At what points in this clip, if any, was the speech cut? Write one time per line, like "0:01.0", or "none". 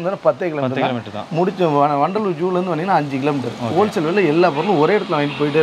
none